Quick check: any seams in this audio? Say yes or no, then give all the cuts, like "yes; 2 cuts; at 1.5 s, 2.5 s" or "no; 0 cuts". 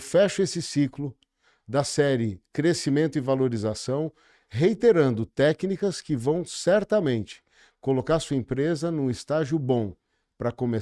no; 0 cuts